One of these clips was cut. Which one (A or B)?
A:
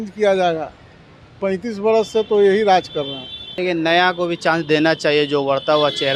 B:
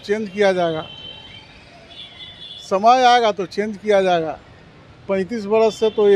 A